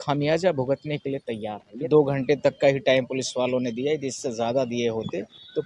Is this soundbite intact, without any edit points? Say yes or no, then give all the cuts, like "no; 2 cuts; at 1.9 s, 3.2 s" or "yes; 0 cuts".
no; 1 cut; at 1.7 s